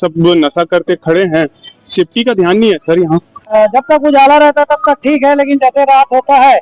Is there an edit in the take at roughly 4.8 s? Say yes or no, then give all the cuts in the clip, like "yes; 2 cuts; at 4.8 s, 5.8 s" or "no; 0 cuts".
no; 1 cut; at 3.5 s